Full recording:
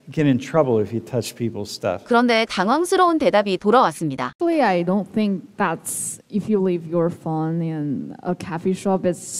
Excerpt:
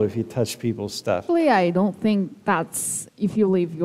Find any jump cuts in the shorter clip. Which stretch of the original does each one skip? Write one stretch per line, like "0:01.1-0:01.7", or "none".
0:02.0-0:04.3